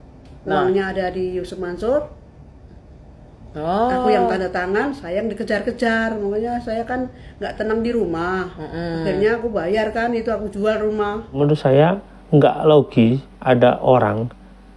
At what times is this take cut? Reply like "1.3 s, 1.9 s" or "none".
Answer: 11.4 s